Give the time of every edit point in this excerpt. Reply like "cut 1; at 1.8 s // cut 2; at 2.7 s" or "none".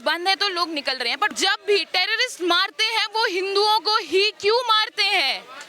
cut 1; at 1.3 s